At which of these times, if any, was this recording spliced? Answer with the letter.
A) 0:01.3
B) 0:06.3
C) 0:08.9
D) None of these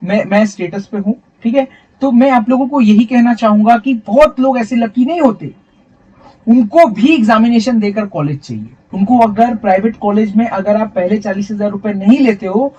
D